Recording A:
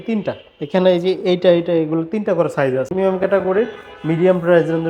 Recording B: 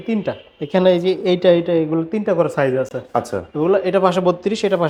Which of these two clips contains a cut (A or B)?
A